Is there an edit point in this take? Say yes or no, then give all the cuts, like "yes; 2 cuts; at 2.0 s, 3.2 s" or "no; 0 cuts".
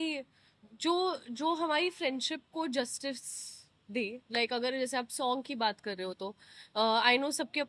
no; 0 cuts